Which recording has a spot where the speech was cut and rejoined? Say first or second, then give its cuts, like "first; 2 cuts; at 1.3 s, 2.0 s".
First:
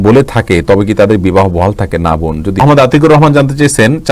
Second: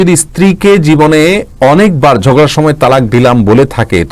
first; 1 cut; at 2.6 s